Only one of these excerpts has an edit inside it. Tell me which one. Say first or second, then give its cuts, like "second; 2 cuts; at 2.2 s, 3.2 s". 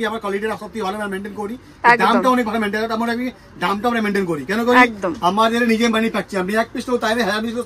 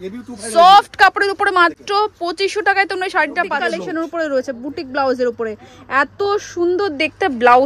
second; 1 cut; at 3.6 s